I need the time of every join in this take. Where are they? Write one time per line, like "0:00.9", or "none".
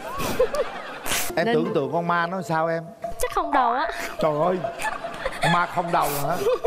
0:01.3